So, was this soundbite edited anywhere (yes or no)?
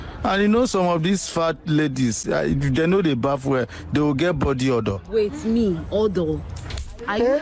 no